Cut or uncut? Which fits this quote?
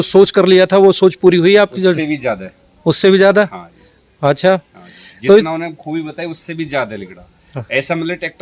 uncut